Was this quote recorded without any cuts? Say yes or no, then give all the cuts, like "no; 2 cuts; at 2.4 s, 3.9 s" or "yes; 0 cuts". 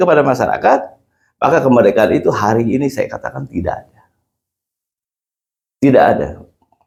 yes; 0 cuts